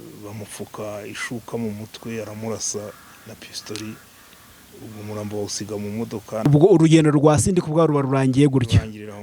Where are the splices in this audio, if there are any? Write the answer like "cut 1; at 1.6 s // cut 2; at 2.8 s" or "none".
cut 1; at 6.5 s